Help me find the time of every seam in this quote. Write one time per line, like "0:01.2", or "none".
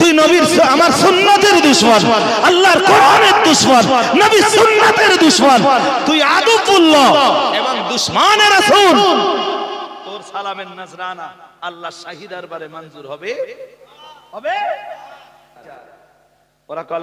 0:15.6